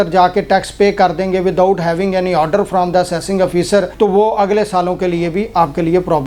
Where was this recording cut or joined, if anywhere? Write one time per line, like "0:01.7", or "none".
none